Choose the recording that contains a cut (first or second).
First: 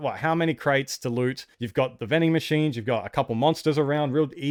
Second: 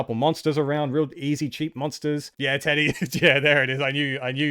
second